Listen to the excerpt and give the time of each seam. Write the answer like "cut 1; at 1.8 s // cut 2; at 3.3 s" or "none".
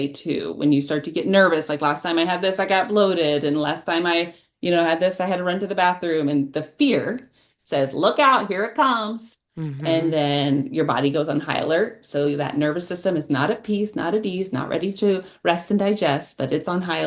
none

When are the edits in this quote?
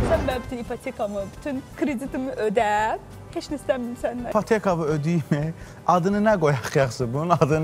cut 1; at 4.3 s

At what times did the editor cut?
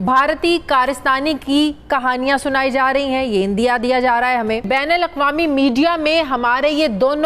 cut 1; at 4.7 s

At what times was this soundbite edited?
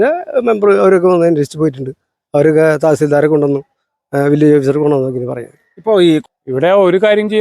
cut 1; at 6.2 s

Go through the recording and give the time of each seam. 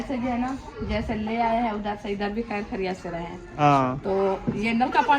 cut 1; at 3.5 s

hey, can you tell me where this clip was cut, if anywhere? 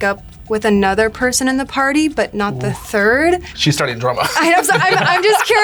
cut 1; at 3.5 s

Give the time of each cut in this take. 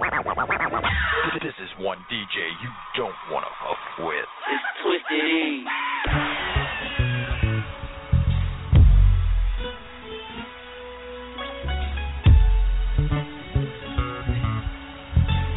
cut 1; at 6.1 s

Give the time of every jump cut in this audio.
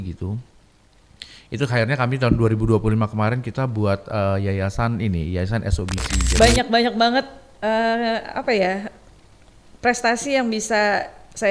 cut 1; at 6.2 s

